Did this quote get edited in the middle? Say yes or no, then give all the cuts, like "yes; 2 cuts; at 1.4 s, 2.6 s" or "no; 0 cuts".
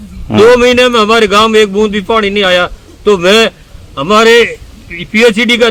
no; 0 cuts